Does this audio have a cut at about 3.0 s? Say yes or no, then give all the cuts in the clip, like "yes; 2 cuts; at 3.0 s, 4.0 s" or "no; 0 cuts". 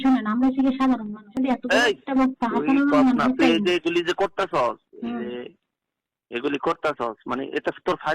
no; 1 cut; at 1.2 s